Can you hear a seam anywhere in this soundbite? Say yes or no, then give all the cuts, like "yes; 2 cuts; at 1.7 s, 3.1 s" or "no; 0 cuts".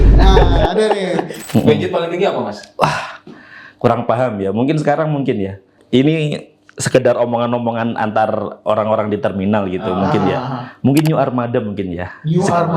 yes; 2 cuts; at 1.3 s, 5.7 s